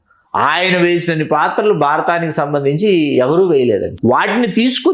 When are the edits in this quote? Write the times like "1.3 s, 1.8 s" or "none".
3.9 s